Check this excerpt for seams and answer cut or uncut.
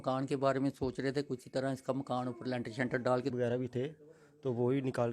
cut